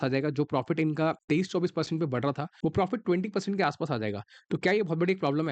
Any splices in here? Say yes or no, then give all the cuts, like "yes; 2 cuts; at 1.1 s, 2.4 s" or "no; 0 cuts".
yes; 2 cuts; at 1.2 s, 2.5 s